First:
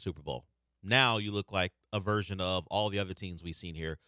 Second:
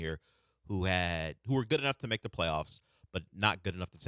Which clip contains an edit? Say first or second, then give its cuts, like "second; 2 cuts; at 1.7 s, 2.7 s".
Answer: first; 1 cut; at 1.8 s